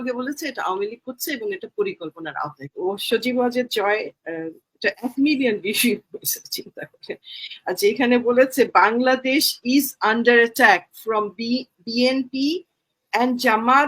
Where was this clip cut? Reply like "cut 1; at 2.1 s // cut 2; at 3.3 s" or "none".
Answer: cut 1; at 2.7 s